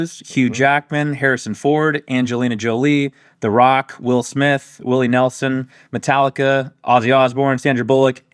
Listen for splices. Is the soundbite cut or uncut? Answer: uncut